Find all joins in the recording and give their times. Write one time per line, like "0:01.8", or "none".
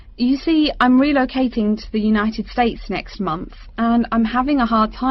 none